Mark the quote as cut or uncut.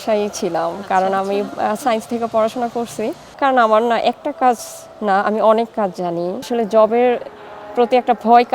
cut